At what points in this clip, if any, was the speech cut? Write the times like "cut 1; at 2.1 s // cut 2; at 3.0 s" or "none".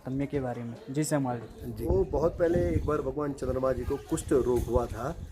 cut 1; at 1.7 s